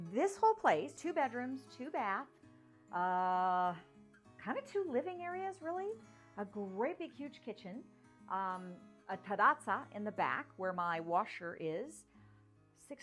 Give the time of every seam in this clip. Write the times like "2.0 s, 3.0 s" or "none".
0.9 s